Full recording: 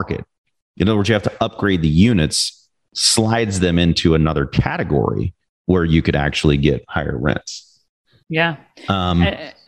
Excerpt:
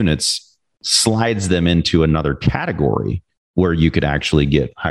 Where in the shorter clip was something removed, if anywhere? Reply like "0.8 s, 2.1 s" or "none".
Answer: none